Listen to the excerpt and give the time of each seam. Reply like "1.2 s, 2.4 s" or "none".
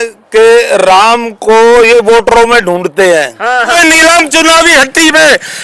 3.7 s